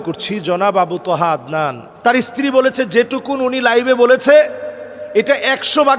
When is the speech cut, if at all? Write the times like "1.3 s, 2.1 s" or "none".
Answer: 1.8 s